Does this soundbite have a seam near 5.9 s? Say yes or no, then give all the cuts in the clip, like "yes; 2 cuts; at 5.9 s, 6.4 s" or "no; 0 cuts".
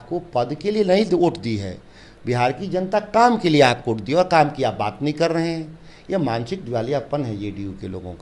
no; 0 cuts